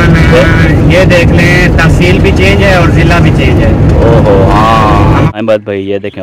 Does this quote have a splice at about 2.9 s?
no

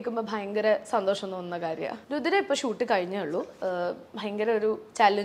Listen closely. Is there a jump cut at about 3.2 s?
no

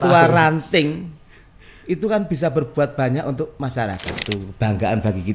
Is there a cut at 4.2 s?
yes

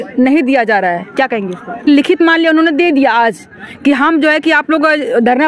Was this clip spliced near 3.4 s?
no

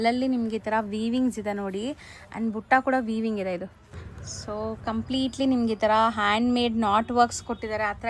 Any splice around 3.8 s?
yes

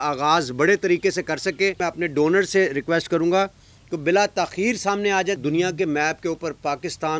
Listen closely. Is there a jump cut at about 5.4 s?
yes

